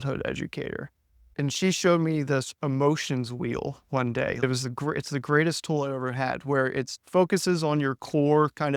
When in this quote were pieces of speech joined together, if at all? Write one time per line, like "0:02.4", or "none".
0:01.3
0:04.4
0:07.0